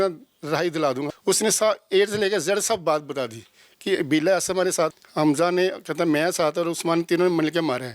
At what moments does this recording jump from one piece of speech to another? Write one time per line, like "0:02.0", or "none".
0:01.1
0:05.0